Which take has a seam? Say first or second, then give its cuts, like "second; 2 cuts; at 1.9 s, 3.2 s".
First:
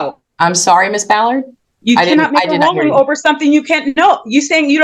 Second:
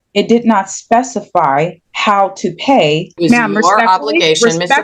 second; 2 cuts; at 1.9 s, 3.1 s